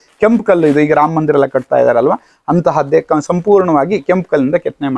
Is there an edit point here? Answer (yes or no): no